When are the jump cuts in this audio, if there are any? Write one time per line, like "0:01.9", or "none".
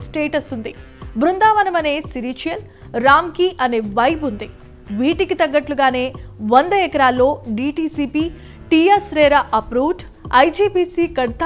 none

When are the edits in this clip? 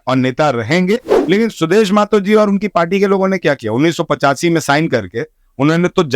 0:01.1

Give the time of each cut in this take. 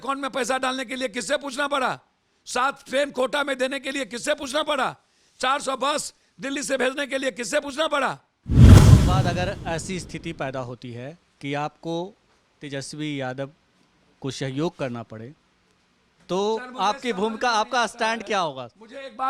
0:08.3
0:09.2

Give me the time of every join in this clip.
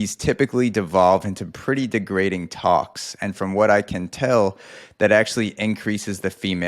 none

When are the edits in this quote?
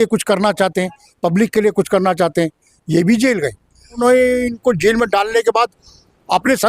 0:04.0

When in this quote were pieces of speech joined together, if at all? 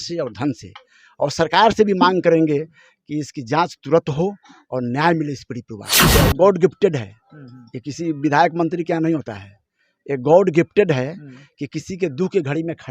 0:06.1

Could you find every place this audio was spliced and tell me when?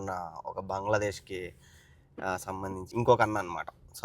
0:02.9

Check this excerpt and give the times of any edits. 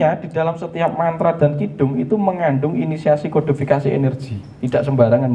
none

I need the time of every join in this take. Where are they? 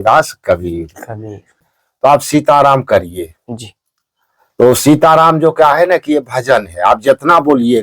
0:01.7

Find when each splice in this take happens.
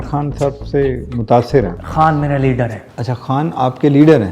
0:01.8

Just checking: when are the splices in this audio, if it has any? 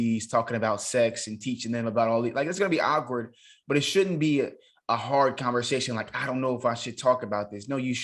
none

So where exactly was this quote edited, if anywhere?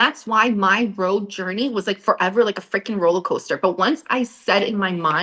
none

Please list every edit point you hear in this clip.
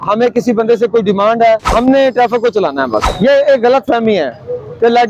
0:01.7
0:03.1

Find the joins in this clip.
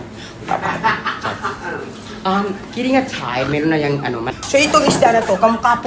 0:04.2

